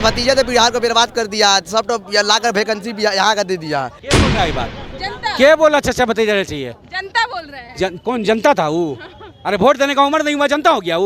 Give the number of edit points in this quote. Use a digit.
1